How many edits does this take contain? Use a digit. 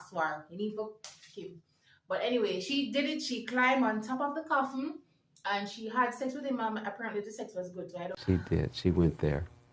1